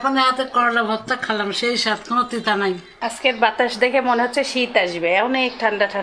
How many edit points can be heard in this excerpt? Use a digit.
1